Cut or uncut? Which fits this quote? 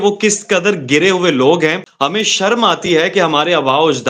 cut